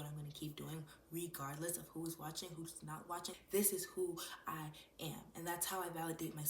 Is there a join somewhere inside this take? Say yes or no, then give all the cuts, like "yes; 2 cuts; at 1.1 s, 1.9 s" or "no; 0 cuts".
yes; 1 cut; at 3.4 s